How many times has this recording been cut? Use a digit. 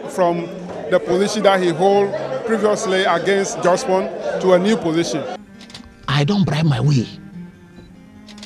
1